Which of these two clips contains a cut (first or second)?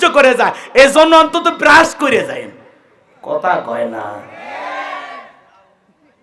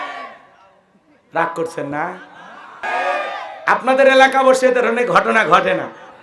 second